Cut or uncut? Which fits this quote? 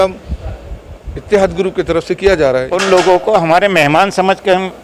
cut